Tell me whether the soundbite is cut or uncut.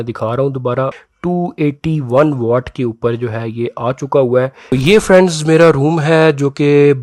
cut